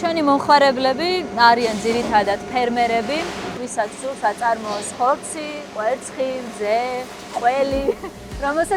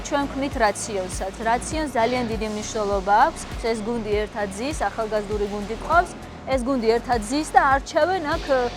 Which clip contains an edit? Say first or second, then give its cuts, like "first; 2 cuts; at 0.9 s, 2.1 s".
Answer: second; 1 cut; at 3.6 s